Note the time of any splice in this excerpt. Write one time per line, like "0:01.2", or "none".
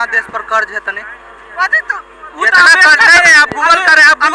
none